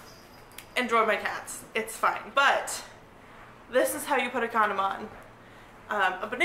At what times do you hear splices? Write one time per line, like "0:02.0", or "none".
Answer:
0:02.2